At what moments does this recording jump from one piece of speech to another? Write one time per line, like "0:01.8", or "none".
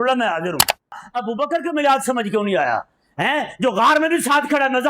0:01.0